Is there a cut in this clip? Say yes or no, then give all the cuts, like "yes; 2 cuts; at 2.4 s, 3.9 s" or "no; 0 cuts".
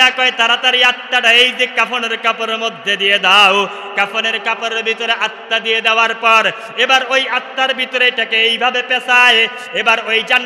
no; 0 cuts